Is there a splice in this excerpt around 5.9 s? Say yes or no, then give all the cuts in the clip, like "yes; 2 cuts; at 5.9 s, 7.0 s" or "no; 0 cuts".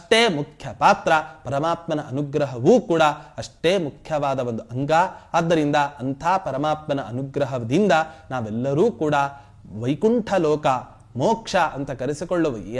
no; 0 cuts